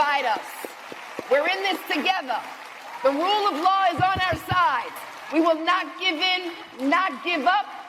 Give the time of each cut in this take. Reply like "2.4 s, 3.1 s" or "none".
none